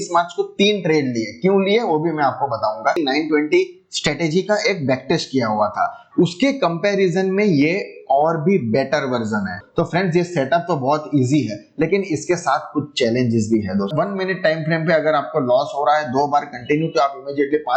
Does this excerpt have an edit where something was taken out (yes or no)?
yes